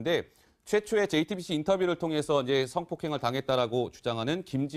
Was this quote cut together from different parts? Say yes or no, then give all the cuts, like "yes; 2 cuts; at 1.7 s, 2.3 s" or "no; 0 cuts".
no; 0 cuts